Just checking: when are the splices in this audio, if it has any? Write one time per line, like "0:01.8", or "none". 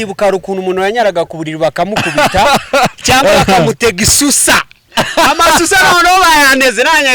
none